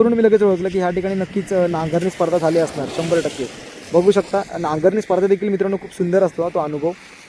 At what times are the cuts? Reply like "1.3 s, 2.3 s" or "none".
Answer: none